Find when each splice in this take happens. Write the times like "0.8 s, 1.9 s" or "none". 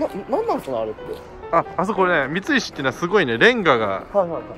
none